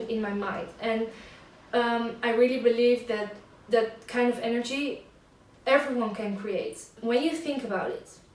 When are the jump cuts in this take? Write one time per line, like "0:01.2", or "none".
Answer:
none